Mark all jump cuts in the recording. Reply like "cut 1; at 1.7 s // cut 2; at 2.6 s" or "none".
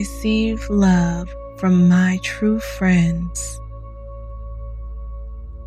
cut 1; at 3.3 s